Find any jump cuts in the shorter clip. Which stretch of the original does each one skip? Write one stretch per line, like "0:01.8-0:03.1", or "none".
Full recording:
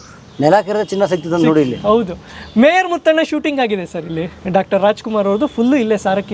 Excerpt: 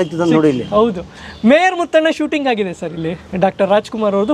none